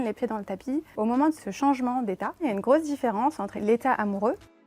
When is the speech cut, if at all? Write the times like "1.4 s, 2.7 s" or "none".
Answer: 1.2 s, 2.4 s, 3.6 s